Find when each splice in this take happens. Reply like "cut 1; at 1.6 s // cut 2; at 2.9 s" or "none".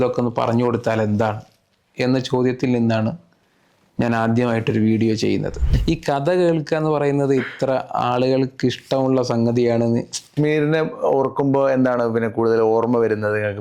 cut 1; at 5.6 s // cut 2; at 10.3 s